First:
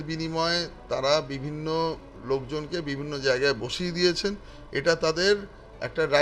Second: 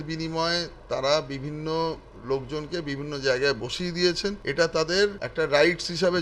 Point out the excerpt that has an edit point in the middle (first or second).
second